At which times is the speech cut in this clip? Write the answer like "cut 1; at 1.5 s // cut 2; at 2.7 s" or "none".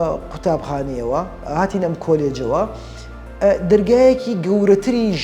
none